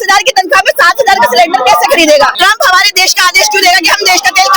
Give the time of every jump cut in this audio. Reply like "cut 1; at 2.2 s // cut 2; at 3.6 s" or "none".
cut 1; at 2.3 s